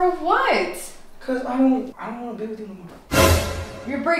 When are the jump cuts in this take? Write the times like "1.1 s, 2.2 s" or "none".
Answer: none

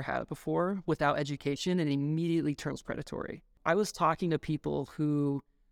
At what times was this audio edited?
3.6 s

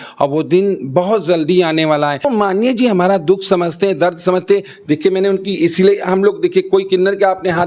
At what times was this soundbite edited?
2.3 s

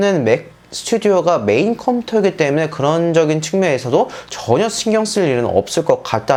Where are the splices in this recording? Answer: none

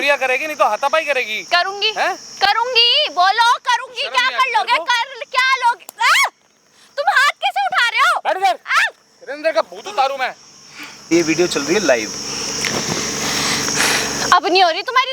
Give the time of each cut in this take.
11.1 s

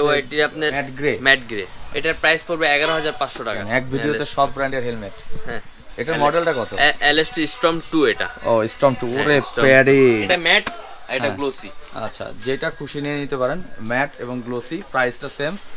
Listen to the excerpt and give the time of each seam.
0.9 s, 1.8 s, 3.6 s, 10.2 s

